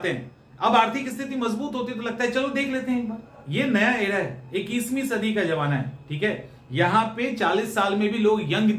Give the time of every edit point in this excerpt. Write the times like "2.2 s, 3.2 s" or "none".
3.4 s